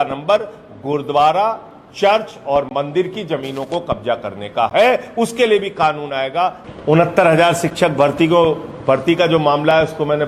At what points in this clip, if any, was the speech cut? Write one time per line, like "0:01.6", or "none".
0:06.6